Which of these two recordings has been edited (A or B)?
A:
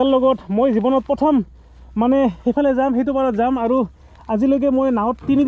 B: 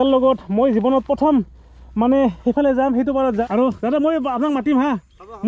B